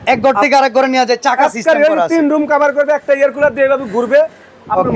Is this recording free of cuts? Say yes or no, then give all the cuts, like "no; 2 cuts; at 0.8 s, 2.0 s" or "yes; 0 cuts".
yes; 0 cuts